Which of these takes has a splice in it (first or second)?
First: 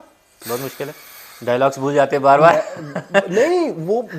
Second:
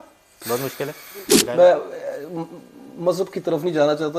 second